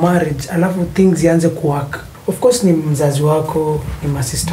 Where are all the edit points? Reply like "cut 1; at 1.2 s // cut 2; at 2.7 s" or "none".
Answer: cut 1; at 2.1 s